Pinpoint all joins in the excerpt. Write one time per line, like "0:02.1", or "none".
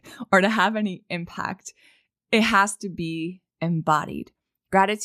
none